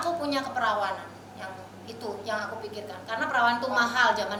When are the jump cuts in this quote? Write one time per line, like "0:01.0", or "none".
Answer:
none